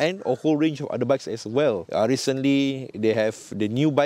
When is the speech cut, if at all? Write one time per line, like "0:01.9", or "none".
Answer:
0:01.8